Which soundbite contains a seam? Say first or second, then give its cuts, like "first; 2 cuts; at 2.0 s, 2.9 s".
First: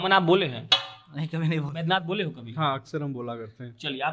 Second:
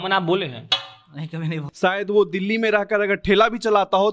second; 1 cut; at 1.6 s